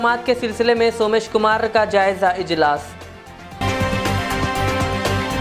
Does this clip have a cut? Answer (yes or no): no